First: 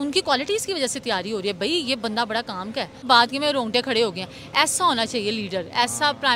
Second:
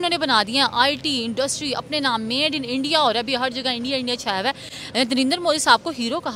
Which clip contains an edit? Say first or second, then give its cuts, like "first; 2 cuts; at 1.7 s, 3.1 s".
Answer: first; 1 cut; at 3.0 s